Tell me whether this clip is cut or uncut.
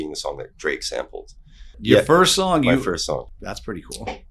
cut